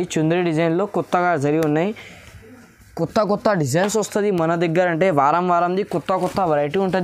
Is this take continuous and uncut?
yes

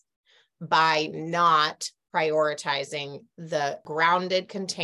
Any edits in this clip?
yes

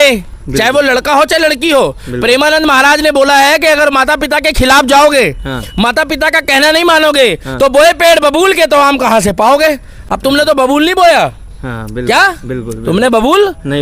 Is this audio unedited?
yes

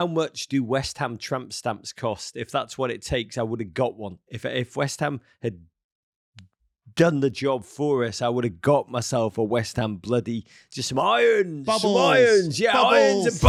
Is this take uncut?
yes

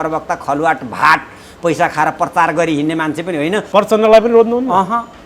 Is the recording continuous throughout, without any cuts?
no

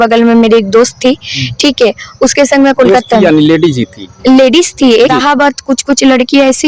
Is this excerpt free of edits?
no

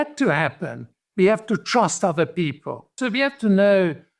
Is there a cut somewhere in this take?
yes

